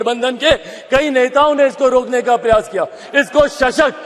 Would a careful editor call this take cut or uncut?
uncut